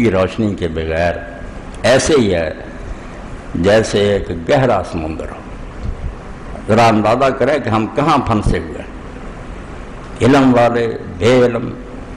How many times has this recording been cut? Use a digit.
1